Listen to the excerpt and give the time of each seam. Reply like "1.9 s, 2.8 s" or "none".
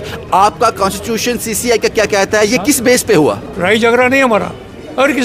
3.4 s